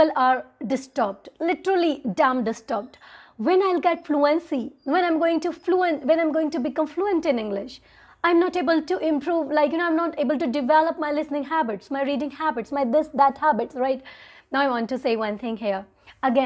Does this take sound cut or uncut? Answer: uncut